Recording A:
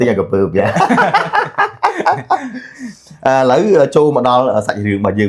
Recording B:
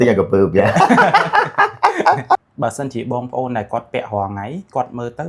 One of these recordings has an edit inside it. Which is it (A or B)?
B